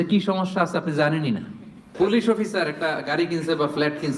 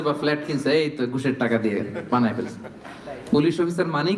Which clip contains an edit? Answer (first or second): first